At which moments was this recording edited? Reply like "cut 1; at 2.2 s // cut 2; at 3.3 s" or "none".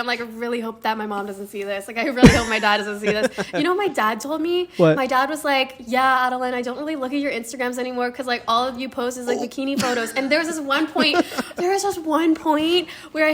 none